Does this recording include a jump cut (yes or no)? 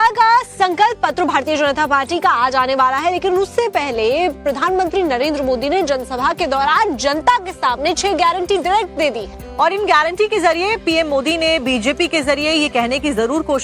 no